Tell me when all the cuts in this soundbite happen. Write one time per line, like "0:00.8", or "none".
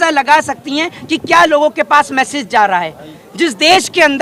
none